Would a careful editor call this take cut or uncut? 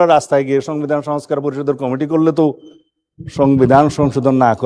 uncut